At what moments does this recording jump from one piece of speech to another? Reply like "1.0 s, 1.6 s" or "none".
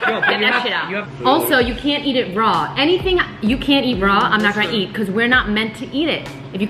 1.0 s